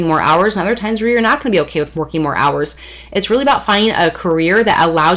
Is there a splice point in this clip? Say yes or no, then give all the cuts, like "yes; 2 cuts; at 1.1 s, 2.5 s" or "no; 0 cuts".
no; 0 cuts